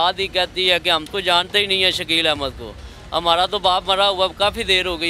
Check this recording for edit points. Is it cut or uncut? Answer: cut